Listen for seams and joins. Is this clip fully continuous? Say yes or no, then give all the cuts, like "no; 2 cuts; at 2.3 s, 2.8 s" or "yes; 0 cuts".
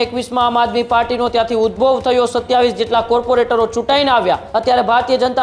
no; 1 cut; at 4.5 s